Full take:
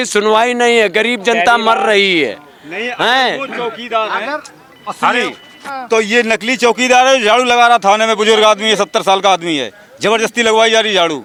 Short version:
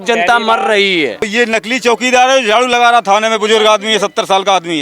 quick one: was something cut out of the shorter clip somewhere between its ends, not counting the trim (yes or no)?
yes